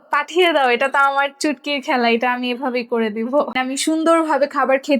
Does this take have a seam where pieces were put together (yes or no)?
yes